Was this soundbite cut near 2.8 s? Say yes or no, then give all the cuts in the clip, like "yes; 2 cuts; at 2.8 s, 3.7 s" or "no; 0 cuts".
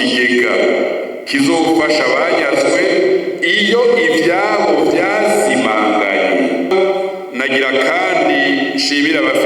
no; 1 cut; at 6.7 s